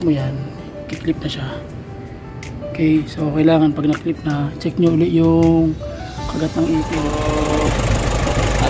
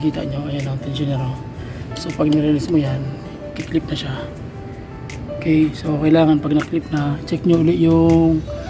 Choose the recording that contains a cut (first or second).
first